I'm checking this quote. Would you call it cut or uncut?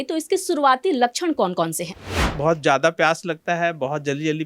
cut